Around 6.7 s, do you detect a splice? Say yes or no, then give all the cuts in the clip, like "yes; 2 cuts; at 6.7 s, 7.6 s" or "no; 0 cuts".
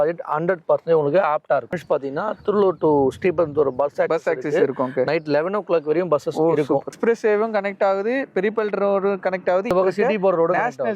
yes; 3 cuts; at 1.7 s, 6.7 s, 9.7 s